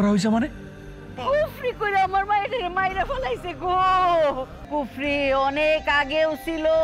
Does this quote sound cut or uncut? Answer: cut